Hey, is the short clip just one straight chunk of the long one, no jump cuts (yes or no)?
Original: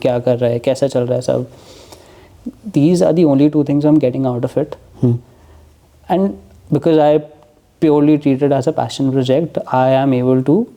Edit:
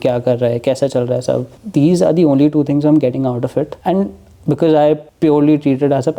no